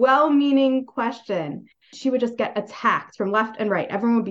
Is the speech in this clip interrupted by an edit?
no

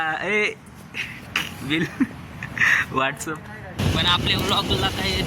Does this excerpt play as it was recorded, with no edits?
no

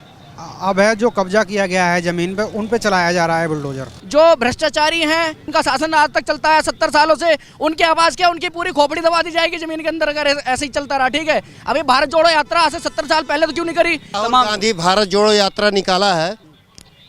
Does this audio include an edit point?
yes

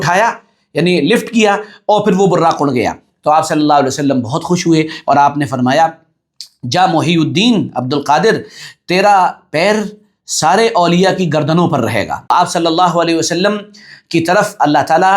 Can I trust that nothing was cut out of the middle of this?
no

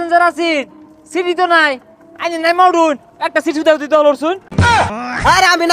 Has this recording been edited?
yes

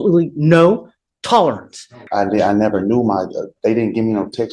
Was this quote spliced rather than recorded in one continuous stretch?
yes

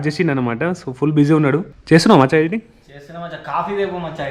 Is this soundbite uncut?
no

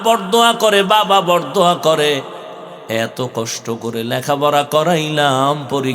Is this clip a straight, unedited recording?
yes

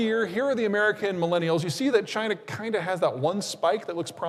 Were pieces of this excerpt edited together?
no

